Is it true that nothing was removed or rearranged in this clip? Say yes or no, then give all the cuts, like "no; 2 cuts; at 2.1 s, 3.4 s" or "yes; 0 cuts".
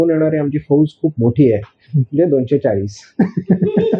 yes; 0 cuts